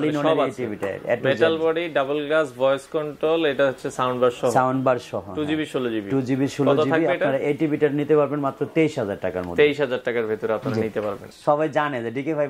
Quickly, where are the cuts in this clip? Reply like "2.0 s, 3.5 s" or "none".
11.3 s

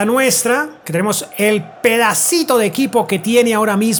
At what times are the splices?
none

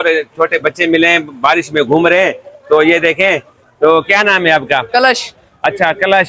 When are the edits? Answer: none

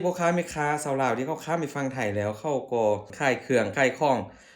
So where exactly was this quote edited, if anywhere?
3.1 s

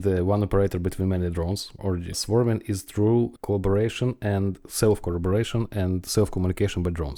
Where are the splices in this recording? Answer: none

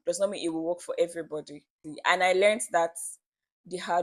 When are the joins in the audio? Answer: none

